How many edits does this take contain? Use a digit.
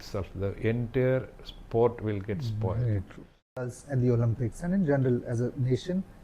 1